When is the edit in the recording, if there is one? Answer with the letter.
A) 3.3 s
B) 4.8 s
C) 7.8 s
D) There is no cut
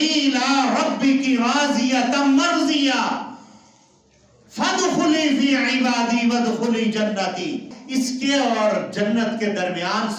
C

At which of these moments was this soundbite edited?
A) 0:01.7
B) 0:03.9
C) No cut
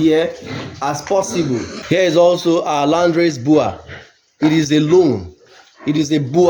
A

